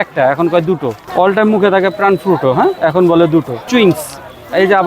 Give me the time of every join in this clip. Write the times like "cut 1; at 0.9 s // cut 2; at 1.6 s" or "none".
cut 1; at 1.0 s // cut 2; at 2.8 s // cut 3; at 3.6 s